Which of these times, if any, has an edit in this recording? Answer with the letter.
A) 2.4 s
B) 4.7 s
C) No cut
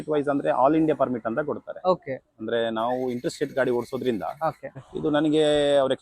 B